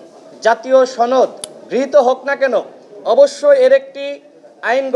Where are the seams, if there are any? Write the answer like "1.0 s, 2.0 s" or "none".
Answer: none